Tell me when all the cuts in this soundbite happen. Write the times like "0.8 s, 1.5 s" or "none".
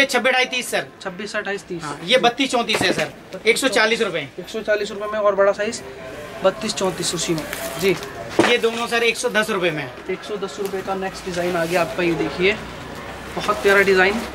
none